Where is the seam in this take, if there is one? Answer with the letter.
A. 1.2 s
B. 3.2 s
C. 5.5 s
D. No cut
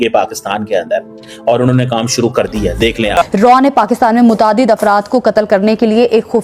B